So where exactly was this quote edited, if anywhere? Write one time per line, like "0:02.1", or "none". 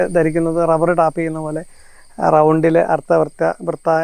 none